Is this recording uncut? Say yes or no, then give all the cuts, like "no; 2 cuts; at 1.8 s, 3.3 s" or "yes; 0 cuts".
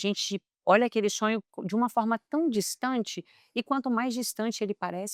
yes; 0 cuts